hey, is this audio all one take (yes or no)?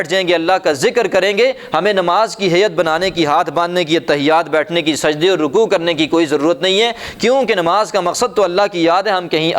yes